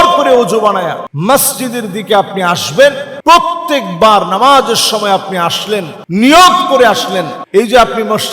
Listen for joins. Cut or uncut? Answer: cut